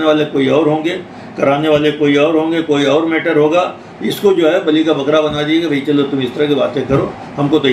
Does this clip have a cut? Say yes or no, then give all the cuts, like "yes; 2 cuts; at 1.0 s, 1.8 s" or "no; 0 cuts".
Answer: no; 0 cuts